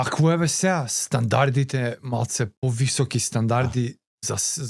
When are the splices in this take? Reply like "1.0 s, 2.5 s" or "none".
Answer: 2.5 s